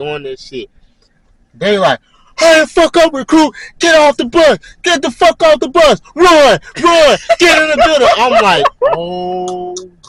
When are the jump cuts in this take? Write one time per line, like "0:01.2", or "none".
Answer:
none